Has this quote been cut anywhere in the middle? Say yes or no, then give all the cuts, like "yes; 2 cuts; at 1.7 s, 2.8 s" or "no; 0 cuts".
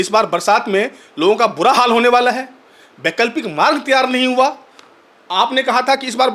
no; 0 cuts